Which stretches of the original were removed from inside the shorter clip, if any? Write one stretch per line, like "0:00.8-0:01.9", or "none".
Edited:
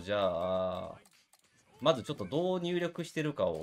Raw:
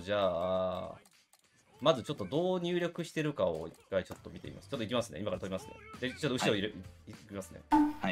none